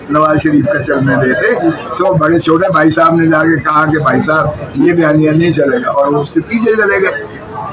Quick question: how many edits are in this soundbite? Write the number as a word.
zero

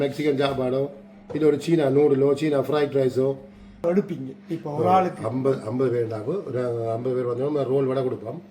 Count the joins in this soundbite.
one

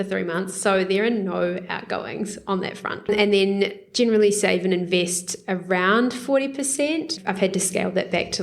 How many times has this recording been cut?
two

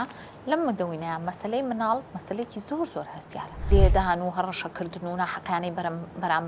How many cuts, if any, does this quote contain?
one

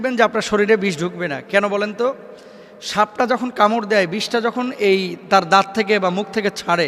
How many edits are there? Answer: zero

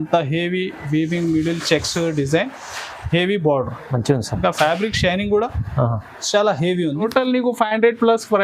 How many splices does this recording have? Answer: one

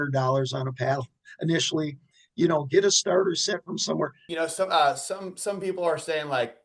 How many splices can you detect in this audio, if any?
one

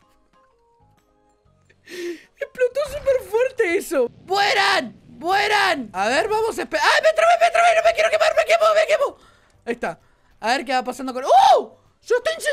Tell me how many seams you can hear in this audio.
two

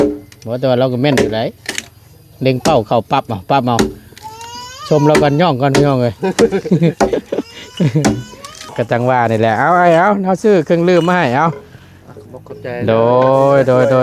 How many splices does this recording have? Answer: one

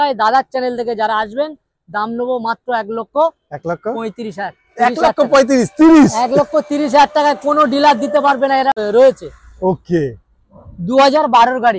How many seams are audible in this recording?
one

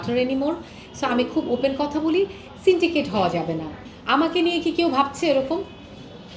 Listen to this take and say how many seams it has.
one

